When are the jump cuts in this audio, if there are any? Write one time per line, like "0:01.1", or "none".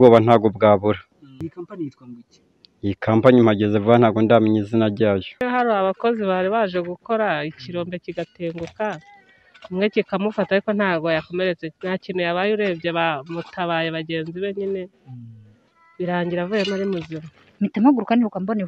0:01.4
0:05.4
0:17.5